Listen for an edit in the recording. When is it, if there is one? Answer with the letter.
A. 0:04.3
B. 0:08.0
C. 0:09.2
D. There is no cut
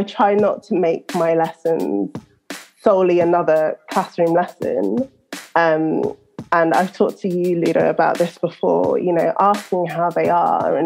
D